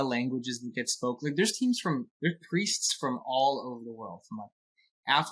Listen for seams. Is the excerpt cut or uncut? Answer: uncut